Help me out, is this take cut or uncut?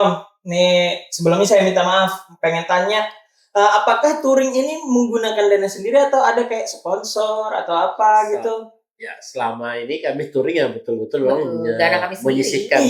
uncut